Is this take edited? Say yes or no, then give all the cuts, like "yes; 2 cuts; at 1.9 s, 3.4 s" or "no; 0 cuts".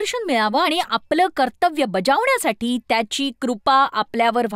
no; 0 cuts